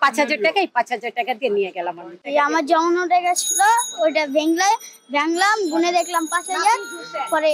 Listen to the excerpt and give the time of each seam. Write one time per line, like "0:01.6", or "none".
0:02.2